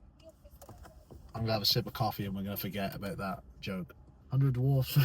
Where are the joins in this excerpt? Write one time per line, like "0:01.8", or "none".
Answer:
0:04.1